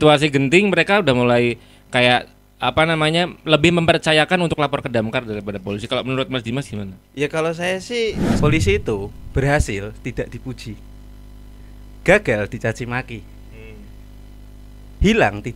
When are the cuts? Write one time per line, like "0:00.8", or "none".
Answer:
0:08.3